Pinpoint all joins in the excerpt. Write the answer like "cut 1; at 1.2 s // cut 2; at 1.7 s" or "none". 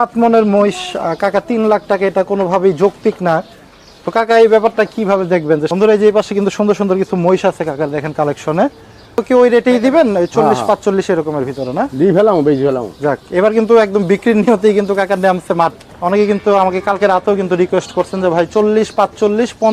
cut 1; at 5.7 s // cut 2; at 9.2 s // cut 3; at 15.7 s